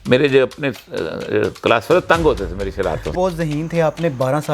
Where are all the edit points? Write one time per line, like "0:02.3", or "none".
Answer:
0:03.1